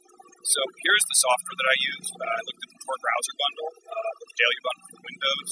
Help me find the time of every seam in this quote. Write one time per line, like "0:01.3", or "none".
0:03.8